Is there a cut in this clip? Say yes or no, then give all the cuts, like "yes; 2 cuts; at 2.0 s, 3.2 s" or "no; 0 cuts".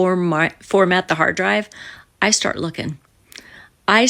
no; 0 cuts